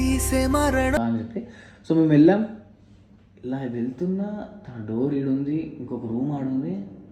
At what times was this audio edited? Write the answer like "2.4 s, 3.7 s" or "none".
1.0 s

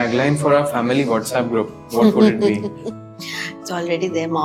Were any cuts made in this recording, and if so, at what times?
none

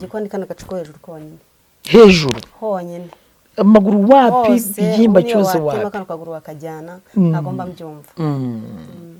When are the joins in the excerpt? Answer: none

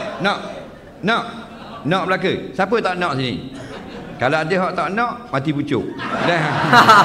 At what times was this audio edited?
none

